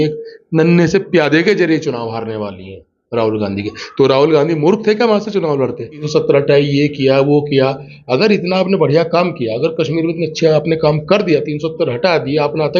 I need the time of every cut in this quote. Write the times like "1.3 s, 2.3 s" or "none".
6.1 s